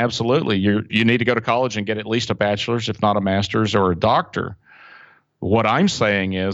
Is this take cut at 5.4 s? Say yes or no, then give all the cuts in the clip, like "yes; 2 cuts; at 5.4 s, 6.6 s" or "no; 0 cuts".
no; 1 cut; at 0.9 s